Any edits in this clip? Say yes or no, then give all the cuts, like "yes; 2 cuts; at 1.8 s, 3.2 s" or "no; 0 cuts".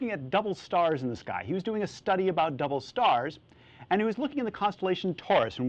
yes; 1 cut; at 2.5 s